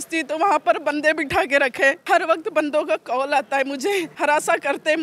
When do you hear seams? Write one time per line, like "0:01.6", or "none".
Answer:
0:02.0
0:04.1